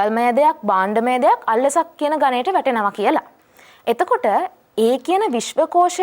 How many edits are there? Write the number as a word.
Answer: zero